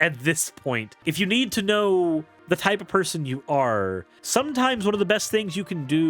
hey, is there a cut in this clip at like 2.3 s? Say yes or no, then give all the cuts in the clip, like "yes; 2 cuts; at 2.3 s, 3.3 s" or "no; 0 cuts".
yes; 3 cuts; at 0.9 s, 2.3 s, 4.1 s